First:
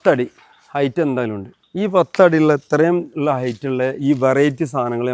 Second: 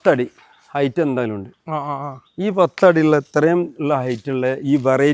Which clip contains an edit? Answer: first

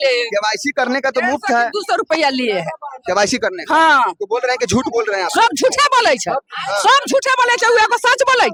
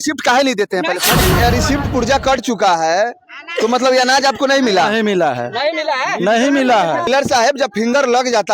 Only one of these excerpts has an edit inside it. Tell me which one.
second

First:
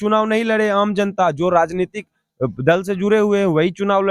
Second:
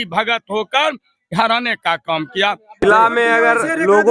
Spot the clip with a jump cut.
second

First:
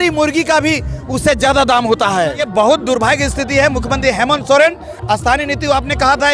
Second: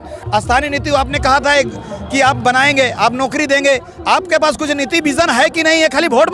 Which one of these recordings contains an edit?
first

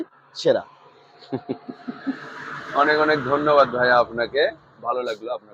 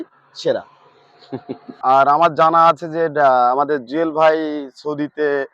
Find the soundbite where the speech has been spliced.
second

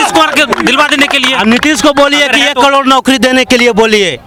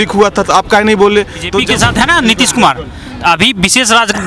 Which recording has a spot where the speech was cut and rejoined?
second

